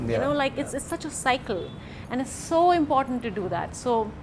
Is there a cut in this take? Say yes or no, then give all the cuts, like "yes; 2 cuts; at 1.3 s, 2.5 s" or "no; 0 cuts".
no; 0 cuts